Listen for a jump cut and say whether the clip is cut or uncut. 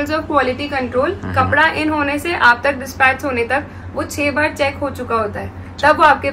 uncut